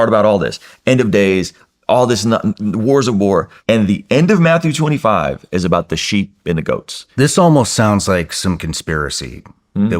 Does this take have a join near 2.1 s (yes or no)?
no